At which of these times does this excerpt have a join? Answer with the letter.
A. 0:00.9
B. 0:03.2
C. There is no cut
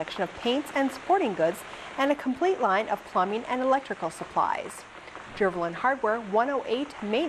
C